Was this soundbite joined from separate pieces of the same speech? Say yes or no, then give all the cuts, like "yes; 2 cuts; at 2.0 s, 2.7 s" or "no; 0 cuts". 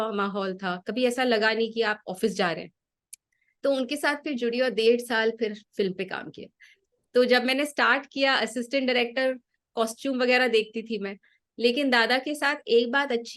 no; 0 cuts